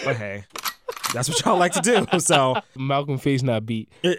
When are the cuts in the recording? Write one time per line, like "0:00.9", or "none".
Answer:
0:02.8